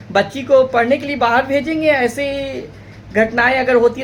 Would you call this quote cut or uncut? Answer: uncut